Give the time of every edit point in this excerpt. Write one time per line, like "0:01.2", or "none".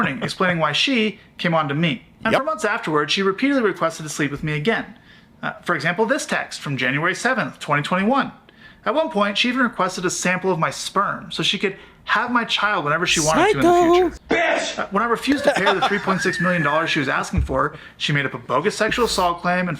0:14.2